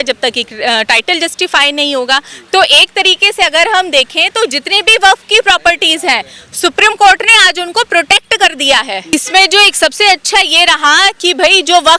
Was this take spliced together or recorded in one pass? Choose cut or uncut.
cut